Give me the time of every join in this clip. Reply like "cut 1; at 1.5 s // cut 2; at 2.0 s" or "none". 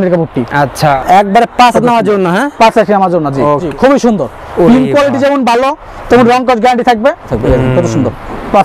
cut 1; at 1.0 s // cut 2; at 3.7 s // cut 3; at 7.3 s